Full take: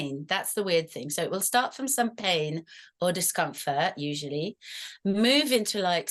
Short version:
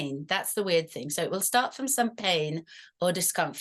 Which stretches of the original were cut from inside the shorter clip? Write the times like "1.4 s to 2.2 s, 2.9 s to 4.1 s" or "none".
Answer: none